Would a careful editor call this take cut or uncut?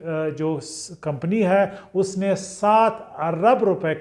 uncut